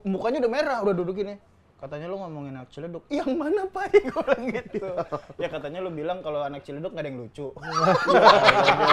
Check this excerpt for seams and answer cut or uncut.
uncut